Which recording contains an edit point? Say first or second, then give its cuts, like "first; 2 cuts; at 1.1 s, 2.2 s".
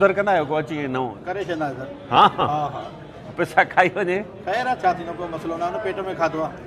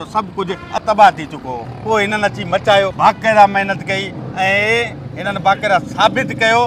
second; 2 cuts; at 1.7 s, 2.9 s